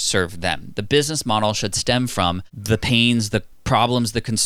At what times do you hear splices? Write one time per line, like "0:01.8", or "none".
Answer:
0:02.5
0:03.5

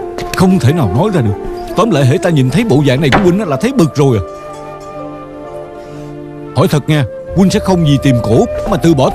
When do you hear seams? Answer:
none

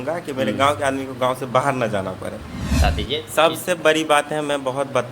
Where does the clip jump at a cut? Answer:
0:02.8

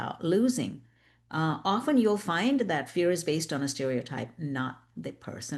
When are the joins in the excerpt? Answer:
none

